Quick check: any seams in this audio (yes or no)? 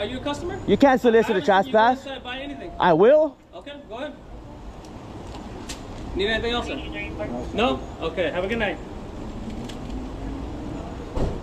no